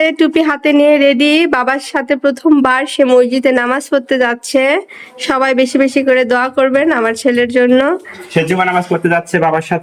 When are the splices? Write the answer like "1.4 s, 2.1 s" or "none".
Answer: none